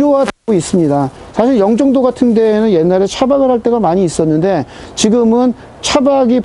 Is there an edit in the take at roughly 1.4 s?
no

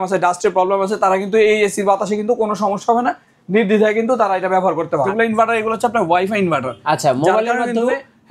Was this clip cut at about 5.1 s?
yes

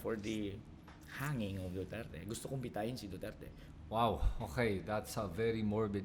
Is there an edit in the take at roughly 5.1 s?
no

